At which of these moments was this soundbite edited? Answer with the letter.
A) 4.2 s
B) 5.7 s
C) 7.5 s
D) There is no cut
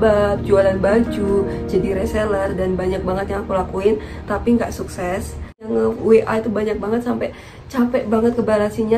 B